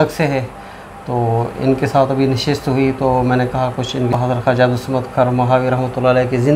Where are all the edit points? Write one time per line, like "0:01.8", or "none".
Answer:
0:04.2